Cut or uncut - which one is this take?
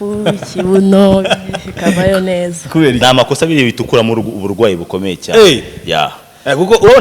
cut